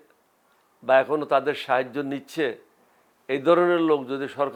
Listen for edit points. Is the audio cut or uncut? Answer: uncut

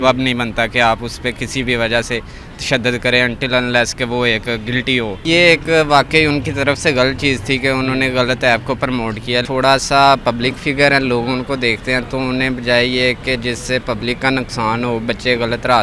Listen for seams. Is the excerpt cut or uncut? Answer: cut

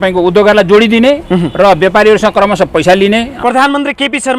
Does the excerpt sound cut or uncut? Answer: cut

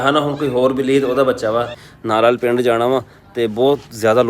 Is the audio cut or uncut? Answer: cut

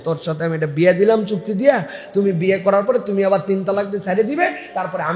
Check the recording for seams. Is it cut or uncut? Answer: uncut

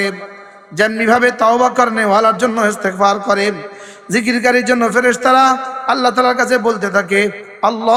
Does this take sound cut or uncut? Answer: uncut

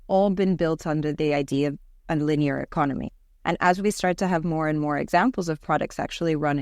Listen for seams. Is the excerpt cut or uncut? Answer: uncut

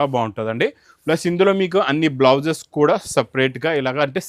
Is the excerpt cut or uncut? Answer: uncut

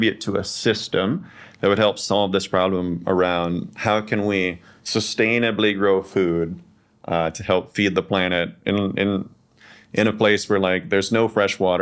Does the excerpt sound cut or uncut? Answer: uncut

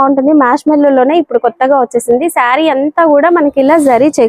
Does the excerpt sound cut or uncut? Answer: uncut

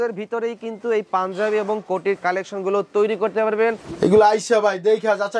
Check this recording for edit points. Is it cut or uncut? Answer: cut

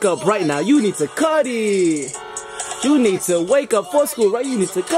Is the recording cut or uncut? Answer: uncut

